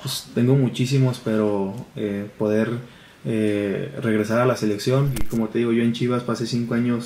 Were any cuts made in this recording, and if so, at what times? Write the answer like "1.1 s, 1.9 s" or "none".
5.3 s